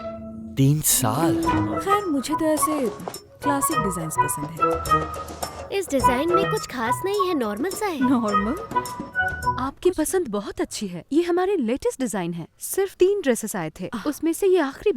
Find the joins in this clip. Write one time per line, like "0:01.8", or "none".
0:01.7
0:09.6

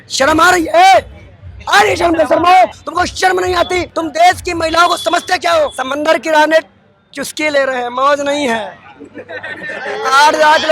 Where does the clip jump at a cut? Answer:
0:02.8
0:03.9
0:05.8

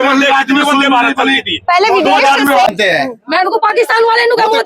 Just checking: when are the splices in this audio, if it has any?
0:02.7

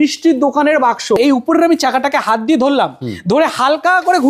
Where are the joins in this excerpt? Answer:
0:01.2

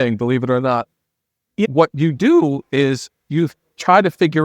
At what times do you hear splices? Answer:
0:01.7

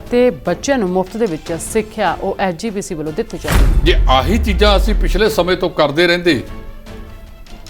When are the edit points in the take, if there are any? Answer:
0:03.7

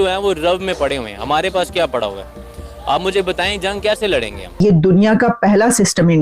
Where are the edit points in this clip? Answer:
0:04.6

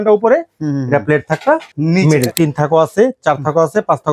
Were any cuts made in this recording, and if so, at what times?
0:02.0

